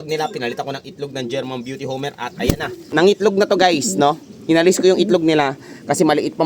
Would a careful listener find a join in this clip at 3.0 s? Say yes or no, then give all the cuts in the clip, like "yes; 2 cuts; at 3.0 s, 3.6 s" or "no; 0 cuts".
yes; 1 cut; at 3.0 s